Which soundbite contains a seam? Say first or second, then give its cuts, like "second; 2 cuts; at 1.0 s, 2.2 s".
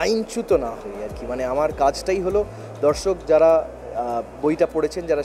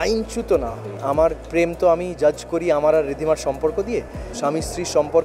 second; 2 cuts; at 1.0 s, 4.3 s